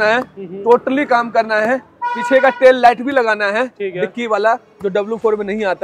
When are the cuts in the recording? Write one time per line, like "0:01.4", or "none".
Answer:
none